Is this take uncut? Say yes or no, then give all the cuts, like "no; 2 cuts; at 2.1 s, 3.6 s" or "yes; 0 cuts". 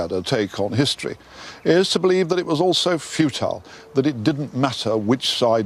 no; 1 cut; at 3.5 s